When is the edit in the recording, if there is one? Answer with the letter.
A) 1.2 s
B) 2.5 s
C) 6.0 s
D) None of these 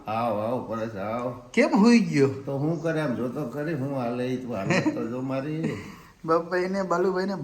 D